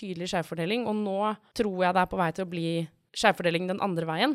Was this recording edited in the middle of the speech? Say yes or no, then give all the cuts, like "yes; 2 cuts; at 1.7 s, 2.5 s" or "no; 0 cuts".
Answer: yes; 2 cuts; at 1.4 s, 3.0 s